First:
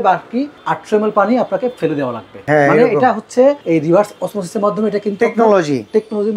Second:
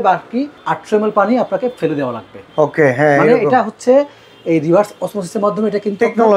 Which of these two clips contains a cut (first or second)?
first